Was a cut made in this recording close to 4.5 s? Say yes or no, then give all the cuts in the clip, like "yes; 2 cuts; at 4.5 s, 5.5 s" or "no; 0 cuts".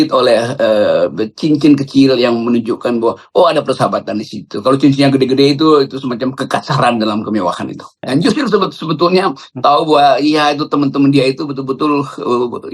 no; 1 cut; at 7.9 s